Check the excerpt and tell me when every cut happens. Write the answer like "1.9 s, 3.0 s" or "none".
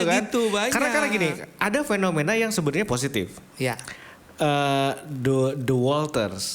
none